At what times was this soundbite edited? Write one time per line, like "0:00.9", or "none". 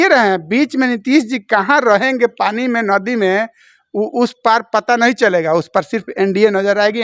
none